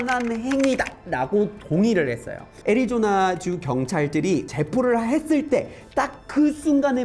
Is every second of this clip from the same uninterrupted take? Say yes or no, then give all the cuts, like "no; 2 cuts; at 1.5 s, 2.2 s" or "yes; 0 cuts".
no; 2 cuts; at 2.5 s, 4.5 s